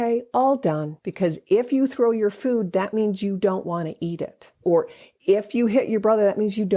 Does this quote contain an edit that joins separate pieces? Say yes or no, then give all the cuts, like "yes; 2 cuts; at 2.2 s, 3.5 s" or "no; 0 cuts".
yes; 2 cuts; at 1.0 s, 4.6 s